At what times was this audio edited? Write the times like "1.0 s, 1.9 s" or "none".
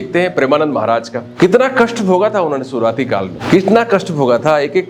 1.2 s, 3.4 s